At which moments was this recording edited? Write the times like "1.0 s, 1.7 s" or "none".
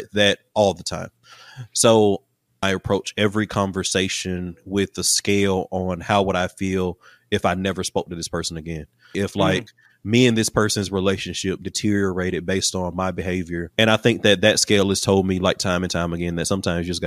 2.5 s, 9.2 s, 13.6 s